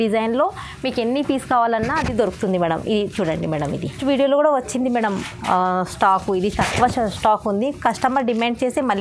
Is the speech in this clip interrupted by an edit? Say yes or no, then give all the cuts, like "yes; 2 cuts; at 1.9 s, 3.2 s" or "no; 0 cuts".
yes; 1 cut; at 4.0 s